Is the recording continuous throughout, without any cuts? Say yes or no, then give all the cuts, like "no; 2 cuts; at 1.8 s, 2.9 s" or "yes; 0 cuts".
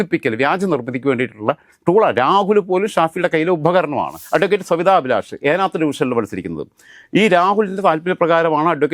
no; 1 cut; at 4.2 s